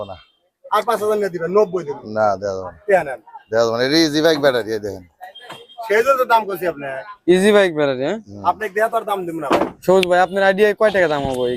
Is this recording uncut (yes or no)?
no